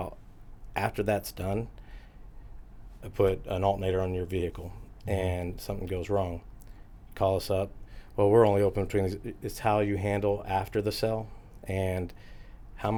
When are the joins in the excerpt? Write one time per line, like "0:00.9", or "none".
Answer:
none